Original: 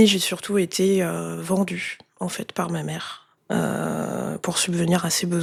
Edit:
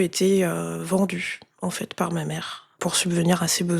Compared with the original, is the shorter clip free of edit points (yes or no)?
no